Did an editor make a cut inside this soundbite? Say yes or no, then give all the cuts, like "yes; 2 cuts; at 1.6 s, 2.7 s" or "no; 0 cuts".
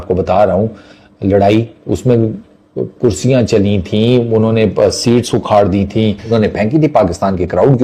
yes; 1 cut; at 6.2 s